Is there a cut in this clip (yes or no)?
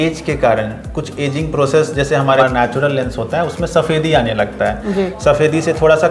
yes